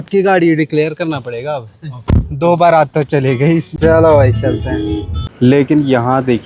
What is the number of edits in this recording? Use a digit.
2